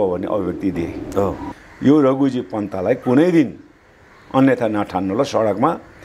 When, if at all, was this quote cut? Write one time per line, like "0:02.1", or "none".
0:01.6

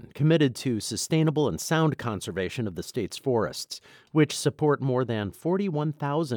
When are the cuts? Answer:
none

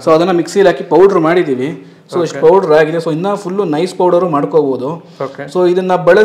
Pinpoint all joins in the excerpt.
none

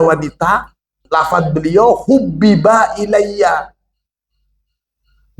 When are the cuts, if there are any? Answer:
0:01.0

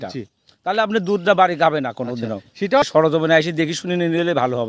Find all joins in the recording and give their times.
0:02.8

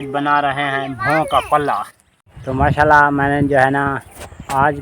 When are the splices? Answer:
0:02.4

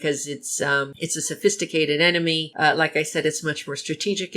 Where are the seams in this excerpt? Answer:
0:00.9
0:02.5

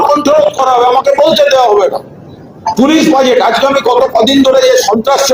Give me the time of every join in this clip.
none

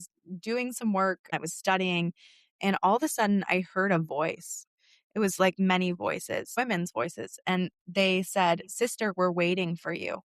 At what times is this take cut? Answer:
0:01.3
0:04.6
0:06.5

